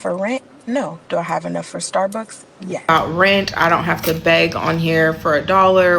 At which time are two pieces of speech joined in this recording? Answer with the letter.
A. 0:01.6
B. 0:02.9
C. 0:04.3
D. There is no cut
B